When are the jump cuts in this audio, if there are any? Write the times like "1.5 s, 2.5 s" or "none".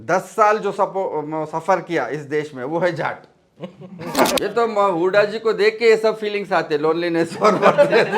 4.4 s